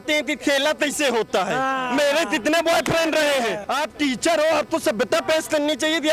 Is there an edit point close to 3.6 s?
yes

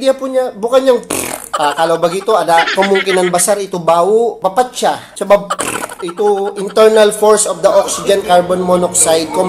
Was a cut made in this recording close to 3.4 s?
no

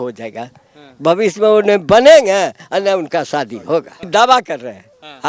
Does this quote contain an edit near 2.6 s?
no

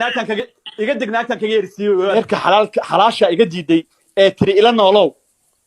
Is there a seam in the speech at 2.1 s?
yes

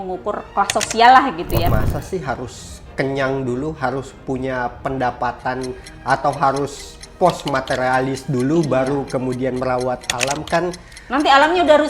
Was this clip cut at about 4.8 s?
no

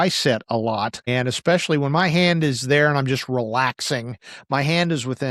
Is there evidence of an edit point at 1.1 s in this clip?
yes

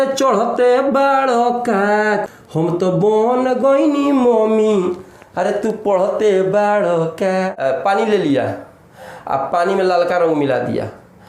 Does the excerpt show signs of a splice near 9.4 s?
no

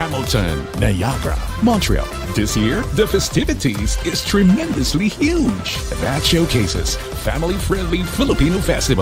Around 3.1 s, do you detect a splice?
no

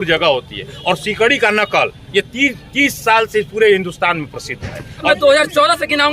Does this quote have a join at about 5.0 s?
yes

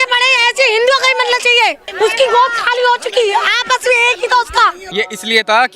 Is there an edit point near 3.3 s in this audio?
no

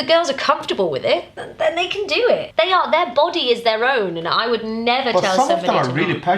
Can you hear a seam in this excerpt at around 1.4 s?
yes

